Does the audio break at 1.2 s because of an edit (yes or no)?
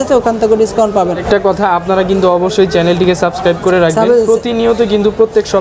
yes